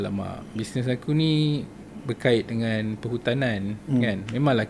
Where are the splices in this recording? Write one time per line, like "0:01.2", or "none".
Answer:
none